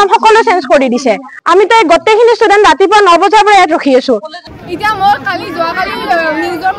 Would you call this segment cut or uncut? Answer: cut